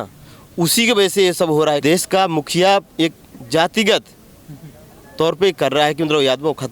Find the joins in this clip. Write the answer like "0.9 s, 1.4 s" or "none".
1.8 s